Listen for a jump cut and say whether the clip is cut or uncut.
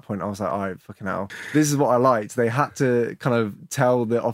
cut